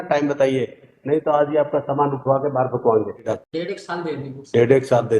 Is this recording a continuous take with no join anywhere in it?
no; 1 cut; at 3.2 s

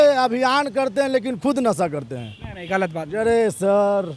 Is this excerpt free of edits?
yes; 0 cuts

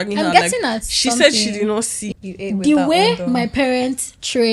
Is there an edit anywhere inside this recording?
yes; 1 cut; at 2.0 s

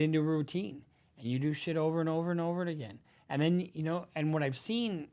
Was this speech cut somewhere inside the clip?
no; 0 cuts

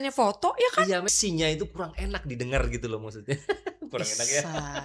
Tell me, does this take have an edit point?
yes; 1 cut; at 1.1 s

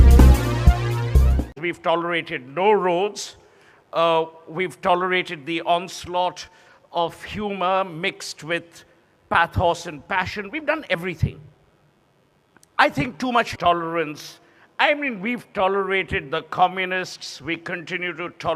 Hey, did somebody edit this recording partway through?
no; 0 cuts

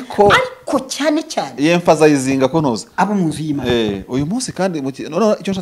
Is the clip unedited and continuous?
yes; 0 cuts

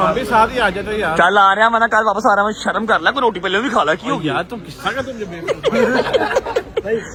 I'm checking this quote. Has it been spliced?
no; 0 cuts

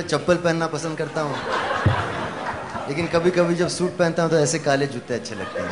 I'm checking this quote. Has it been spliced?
no; 0 cuts

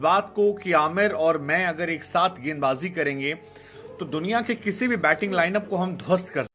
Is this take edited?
no; 0 cuts

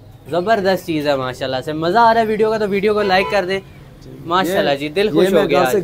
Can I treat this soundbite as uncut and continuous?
yes; 0 cuts

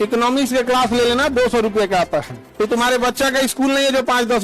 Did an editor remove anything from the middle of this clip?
yes; 1 cut; at 2.4 s

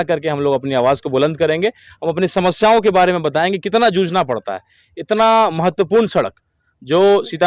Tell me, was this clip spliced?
no; 0 cuts

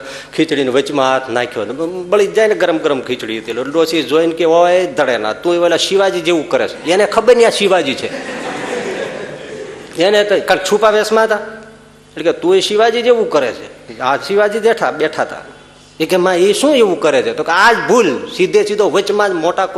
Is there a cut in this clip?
no; 0 cuts

